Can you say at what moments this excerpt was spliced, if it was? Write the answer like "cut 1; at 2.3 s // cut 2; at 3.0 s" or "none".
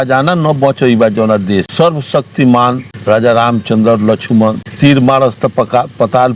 cut 1; at 1.7 s // cut 2; at 2.9 s // cut 3; at 4.7 s